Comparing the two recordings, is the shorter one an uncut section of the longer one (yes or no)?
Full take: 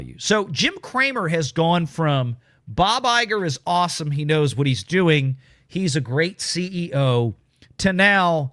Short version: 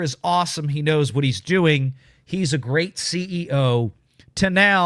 yes